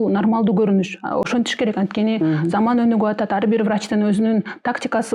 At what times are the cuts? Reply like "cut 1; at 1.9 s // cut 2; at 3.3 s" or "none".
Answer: none